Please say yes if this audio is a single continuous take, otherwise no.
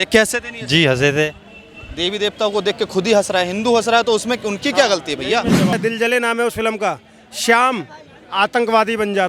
no